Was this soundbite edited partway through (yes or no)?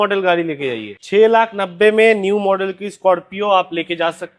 yes